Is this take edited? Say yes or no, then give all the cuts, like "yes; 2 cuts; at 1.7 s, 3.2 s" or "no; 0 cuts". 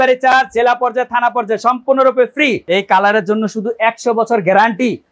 yes; 1 cut; at 2.6 s